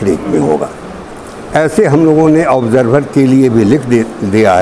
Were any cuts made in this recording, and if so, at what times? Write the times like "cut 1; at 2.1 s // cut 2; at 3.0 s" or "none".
none